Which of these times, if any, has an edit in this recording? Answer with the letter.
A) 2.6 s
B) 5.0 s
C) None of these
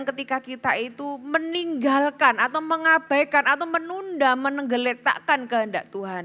C